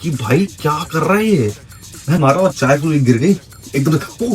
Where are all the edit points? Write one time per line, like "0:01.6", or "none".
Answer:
0:02.2